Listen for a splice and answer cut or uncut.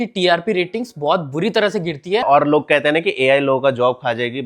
cut